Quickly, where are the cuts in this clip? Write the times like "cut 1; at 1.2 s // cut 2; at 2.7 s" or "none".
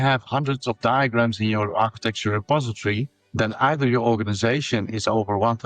none